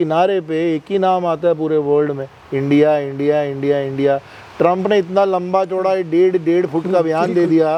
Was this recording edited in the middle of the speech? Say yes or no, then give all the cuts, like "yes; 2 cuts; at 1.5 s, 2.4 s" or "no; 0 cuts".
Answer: no; 0 cuts